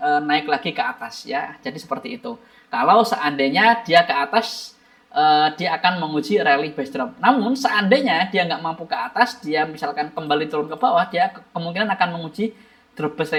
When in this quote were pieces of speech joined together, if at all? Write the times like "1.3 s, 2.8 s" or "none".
none